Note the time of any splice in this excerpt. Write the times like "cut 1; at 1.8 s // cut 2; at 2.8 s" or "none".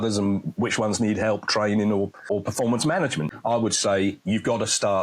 cut 1; at 2.2 s // cut 2; at 3.2 s